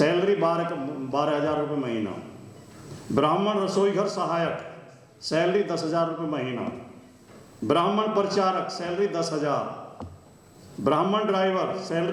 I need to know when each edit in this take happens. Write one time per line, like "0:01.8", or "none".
none